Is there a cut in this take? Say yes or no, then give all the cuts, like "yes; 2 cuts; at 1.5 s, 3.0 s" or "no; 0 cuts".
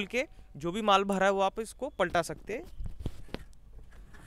no; 0 cuts